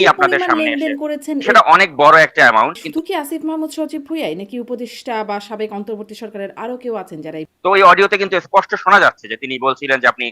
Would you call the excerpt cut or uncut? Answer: cut